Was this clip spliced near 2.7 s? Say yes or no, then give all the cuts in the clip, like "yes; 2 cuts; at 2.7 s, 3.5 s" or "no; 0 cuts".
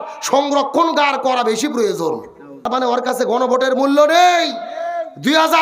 yes; 1 cut; at 2.7 s